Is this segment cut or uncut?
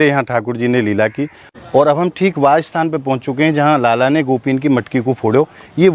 cut